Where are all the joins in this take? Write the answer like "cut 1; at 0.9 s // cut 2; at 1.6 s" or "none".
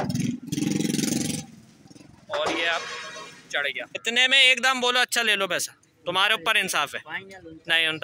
cut 1; at 4.0 s